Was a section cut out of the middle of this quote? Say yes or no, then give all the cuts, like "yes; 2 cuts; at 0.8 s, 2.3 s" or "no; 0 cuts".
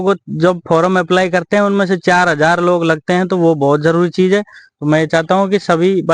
no; 0 cuts